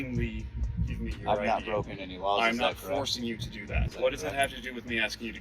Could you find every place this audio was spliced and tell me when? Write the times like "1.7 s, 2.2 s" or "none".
3.9 s